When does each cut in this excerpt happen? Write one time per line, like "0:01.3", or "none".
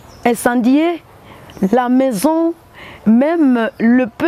none